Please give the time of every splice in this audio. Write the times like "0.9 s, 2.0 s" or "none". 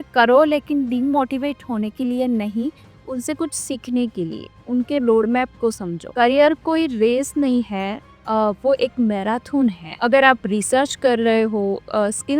6.0 s